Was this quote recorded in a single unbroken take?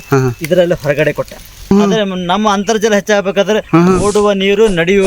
no; 1 cut; at 1.7 s

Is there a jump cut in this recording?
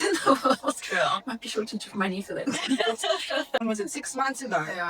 yes; 1 cut; at 3.6 s

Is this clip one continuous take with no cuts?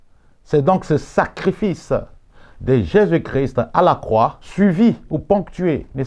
no; 1 cut; at 4.4 s

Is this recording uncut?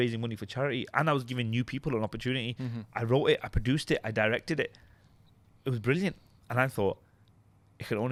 yes; 0 cuts

